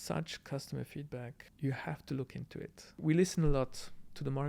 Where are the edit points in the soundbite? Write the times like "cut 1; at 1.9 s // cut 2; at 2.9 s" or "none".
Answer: cut 1; at 1.4 s // cut 2; at 3.0 s